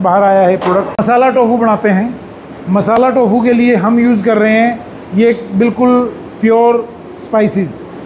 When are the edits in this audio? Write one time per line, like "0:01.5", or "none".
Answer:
0:00.9